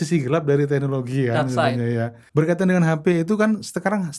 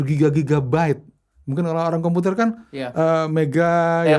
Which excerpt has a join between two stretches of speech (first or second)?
first